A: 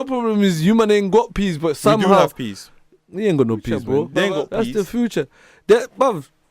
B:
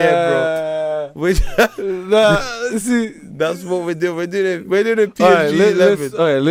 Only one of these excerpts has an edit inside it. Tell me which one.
A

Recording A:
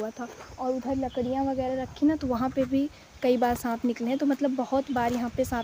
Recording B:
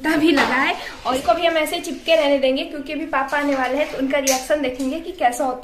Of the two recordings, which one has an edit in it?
B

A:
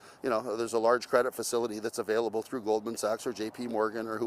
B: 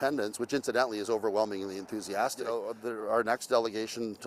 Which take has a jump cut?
B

